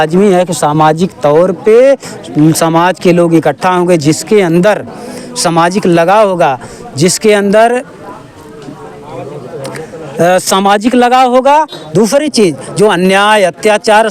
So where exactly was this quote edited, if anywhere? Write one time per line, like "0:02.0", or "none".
none